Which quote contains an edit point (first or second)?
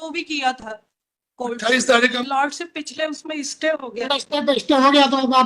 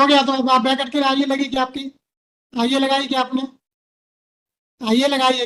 first